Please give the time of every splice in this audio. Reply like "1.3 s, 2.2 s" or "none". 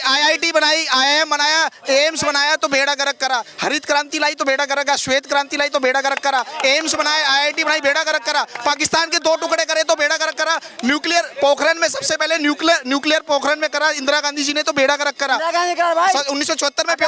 none

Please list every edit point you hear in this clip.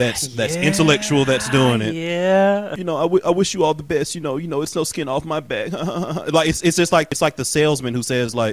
2.7 s, 7.1 s

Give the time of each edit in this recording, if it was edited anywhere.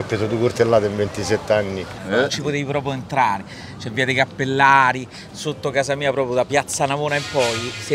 1.9 s

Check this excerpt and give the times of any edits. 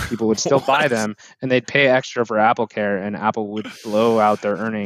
none

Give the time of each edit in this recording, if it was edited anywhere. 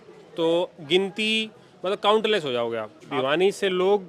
3.1 s

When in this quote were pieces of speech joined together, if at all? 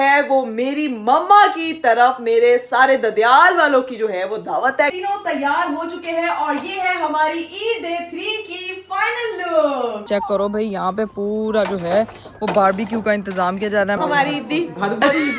4.9 s, 10.0 s, 14.0 s

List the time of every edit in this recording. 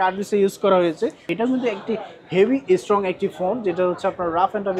1.3 s

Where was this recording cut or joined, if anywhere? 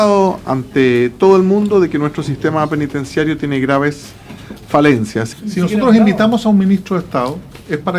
5.3 s

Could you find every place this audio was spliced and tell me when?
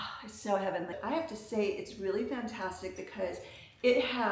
0.9 s

